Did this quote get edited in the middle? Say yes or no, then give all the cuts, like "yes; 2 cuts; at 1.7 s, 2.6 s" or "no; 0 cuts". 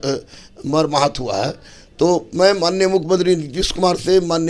no; 0 cuts